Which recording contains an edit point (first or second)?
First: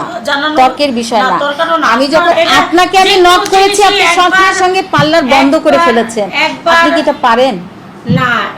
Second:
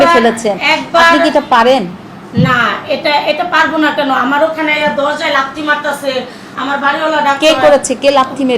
first